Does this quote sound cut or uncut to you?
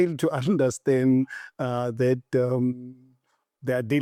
uncut